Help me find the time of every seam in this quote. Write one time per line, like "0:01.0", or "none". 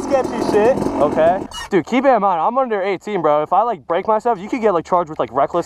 0:01.6